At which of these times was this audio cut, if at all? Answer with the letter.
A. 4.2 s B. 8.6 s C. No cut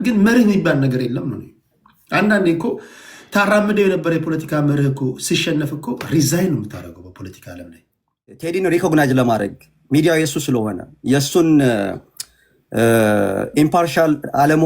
B